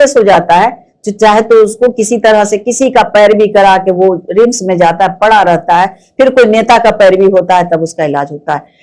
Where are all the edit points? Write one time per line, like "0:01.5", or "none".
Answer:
none

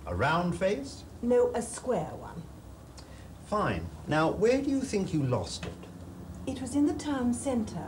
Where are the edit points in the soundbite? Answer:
0:01.0

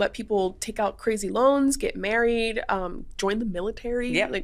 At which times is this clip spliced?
none

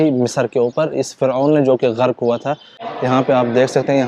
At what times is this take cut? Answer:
0:02.8

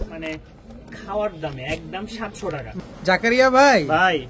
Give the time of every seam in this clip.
0:02.7

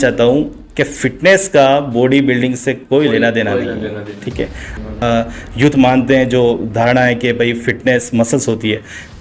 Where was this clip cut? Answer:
0:05.0

